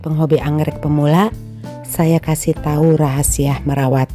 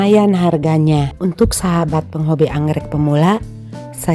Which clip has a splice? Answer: second; 1 cut; at 1.1 s

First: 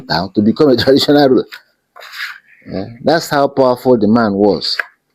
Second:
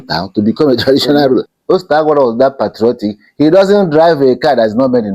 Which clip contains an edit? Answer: second; 1 cut; at 1.5 s

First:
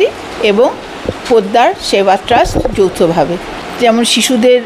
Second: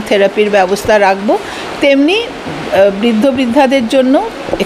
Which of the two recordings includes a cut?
first; 1 cut; at 3.4 s

